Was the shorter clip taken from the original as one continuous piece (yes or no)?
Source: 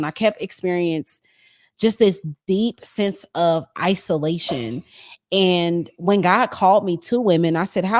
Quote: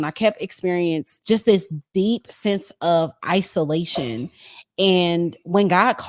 no